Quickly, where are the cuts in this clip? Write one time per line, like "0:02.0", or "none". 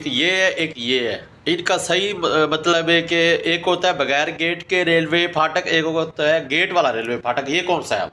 none